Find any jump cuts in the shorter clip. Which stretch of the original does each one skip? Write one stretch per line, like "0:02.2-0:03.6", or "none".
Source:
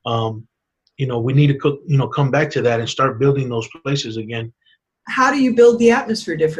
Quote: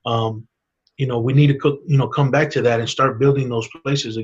none